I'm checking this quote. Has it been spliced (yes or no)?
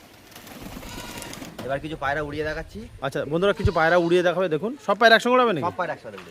yes